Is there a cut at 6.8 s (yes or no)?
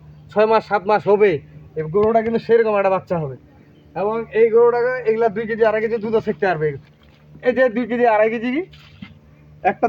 yes